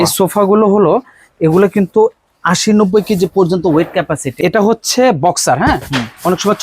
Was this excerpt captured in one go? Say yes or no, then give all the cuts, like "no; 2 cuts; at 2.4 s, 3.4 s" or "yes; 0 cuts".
no; 1 cut; at 4.3 s